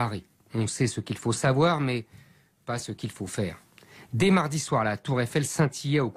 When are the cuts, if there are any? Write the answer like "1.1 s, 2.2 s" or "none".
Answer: 3.6 s